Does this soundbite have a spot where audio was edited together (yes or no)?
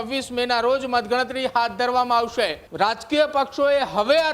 yes